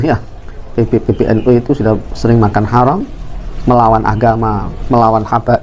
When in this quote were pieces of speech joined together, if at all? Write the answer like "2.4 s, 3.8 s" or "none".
none